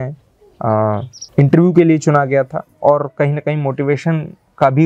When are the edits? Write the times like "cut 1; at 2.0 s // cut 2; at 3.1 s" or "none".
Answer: cut 1; at 1.2 s